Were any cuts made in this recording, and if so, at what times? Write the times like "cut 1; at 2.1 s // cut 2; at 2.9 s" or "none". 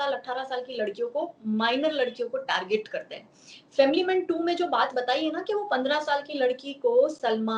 none